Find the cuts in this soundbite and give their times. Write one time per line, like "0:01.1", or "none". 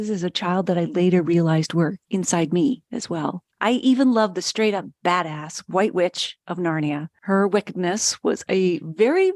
none